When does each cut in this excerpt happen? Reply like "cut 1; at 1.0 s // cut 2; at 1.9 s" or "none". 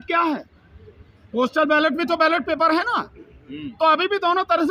none